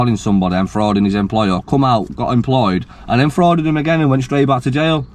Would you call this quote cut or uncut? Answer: uncut